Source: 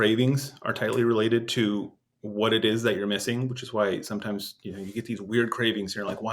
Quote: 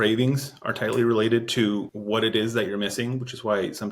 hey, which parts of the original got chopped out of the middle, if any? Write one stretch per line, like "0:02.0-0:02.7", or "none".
0:01.9-0:02.2